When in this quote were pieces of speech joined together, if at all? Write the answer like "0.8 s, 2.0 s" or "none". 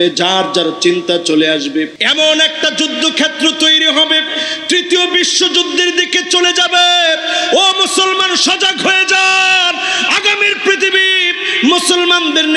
2.0 s